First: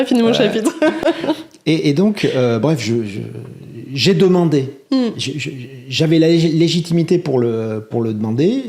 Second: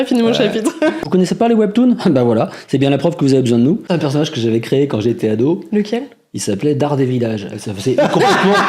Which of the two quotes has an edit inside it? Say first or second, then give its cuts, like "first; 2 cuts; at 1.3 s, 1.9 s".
second; 2 cuts; at 1.0 s, 3.9 s